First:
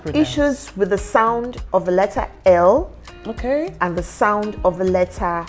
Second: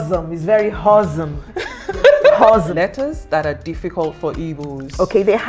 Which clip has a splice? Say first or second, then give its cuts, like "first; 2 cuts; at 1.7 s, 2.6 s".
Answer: second; 1 cut; at 2.7 s